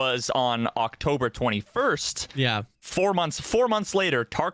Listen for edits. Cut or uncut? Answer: uncut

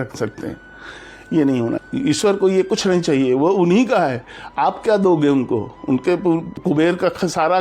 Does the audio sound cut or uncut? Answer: cut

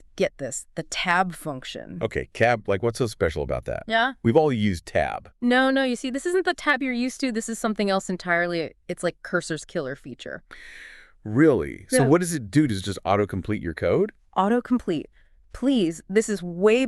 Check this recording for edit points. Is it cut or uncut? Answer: uncut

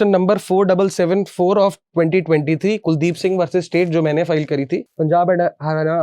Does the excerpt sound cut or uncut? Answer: cut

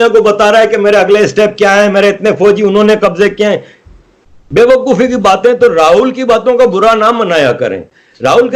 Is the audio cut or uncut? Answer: uncut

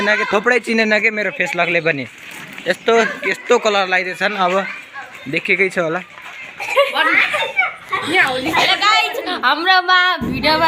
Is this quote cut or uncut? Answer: cut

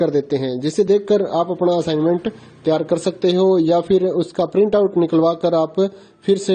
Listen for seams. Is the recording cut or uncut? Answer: cut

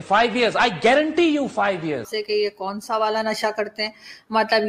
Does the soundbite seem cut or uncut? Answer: cut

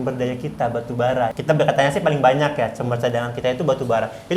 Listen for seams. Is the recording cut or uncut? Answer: cut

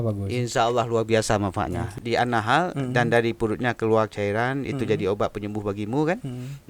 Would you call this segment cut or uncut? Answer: cut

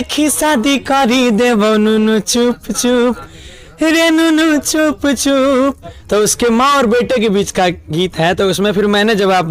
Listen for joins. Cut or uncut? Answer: uncut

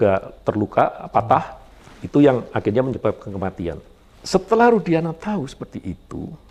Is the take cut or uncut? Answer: uncut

